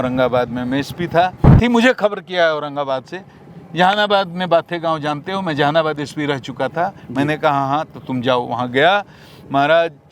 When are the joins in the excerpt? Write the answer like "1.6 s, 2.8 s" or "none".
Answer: 1.5 s

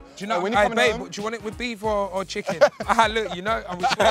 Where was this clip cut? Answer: none

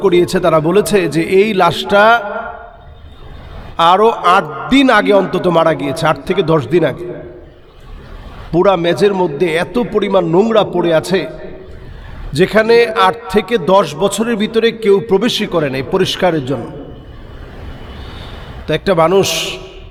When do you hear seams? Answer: none

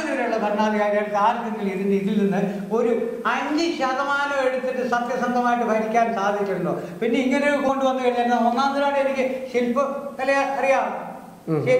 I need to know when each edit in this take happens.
7.7 s

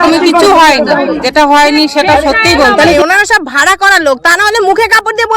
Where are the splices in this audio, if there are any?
1.2 s, 2.9 s

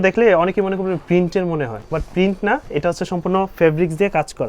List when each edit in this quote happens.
1.8 s

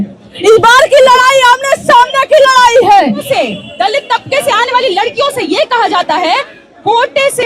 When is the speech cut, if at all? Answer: 3.2 s

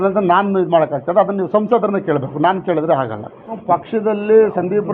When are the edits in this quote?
3.5 s

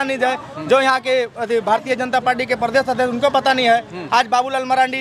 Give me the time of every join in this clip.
none

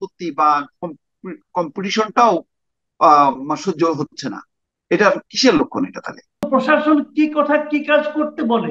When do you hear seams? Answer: 6.5 s

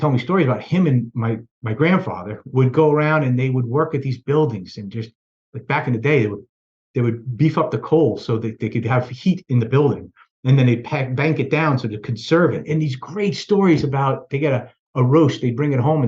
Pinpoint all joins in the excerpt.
2.3 s, 12.6 s

